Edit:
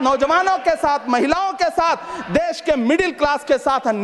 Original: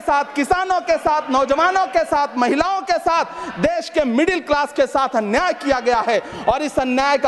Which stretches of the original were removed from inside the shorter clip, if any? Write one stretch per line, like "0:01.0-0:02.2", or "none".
none